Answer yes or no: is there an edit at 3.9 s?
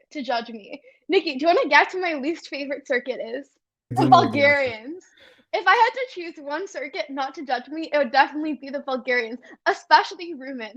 yes